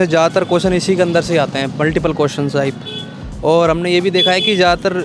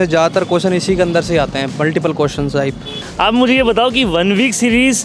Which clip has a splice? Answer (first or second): second